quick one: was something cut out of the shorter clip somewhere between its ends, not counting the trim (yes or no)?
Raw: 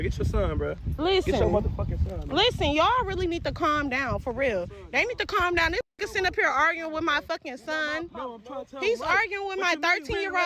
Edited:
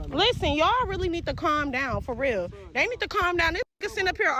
no